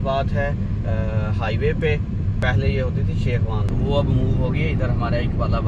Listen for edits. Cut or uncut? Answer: cut